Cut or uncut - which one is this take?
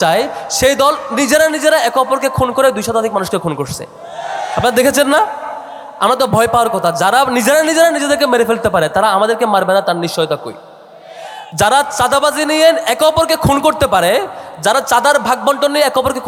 uncut